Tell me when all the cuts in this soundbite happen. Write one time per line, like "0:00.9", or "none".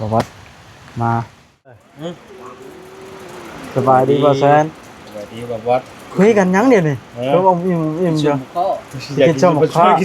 0:01.9